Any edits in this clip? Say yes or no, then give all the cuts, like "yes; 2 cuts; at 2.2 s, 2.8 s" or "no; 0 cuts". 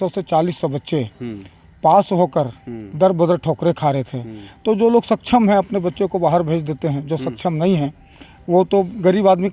no; 0 cuts